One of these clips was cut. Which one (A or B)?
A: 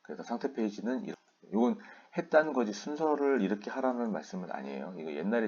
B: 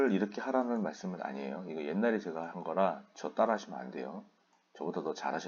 A